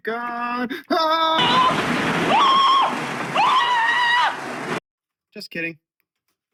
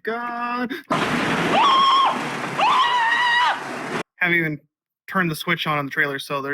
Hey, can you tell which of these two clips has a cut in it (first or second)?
second